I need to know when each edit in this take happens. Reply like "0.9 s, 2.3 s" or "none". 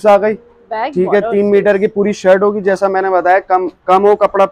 none